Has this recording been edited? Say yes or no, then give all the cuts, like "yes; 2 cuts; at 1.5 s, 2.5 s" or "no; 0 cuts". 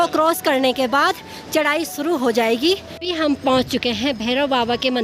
yes; 1 cut; at 2.9 s